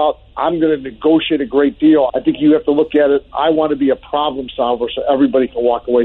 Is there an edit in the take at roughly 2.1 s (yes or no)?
yes